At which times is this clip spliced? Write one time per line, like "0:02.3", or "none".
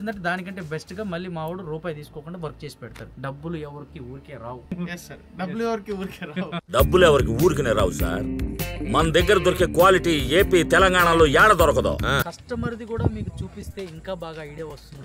0:03.0
0:04.7
0:12.2